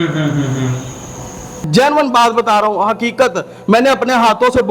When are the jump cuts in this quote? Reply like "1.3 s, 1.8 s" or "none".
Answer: 1.5 s